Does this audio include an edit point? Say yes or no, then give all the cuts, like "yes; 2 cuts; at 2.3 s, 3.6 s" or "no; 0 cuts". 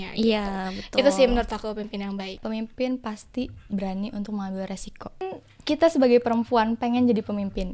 yes; 2 cuts; at 2.4 s, 5.3 s